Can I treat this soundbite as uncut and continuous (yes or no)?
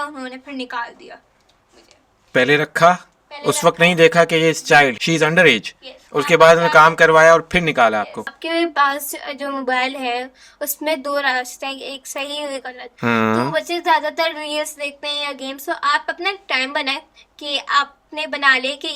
no